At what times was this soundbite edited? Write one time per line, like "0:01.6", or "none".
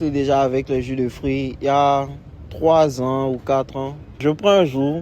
0:04.0